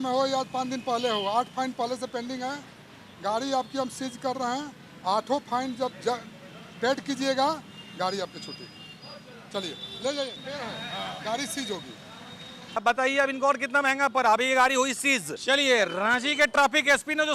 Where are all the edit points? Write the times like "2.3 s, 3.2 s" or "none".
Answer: 10.4 s, 12.8 s, 15.4 s

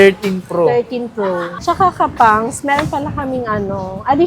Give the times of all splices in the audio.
1.5 s

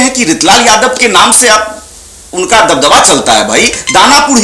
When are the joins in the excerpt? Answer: none

